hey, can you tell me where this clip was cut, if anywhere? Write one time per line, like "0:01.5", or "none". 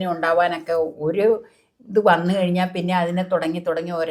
none